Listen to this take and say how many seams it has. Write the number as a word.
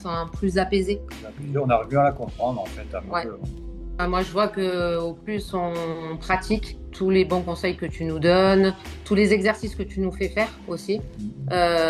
two